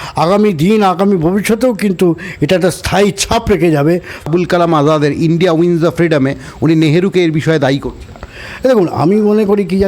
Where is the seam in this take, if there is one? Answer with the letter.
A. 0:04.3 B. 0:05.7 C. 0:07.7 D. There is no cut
A